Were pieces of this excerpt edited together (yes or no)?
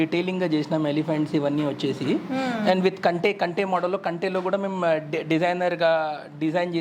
no